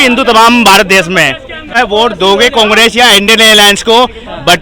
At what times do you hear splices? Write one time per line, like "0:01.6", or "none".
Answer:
0:01.7